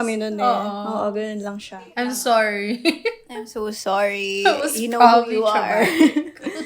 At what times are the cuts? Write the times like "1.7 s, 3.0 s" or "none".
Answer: 1.9 s

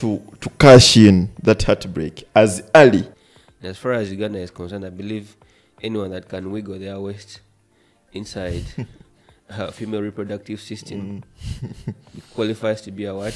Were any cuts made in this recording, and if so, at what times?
3.1 s

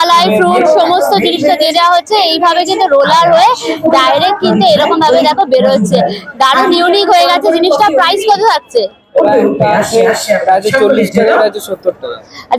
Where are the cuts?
none

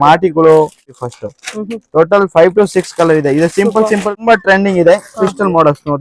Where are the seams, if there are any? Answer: 1.0 s, 4.1 s

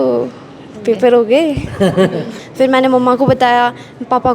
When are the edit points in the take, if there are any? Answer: 2.3 s

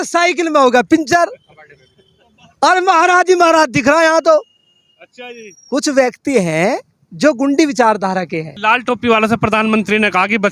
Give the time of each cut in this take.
8.5 s

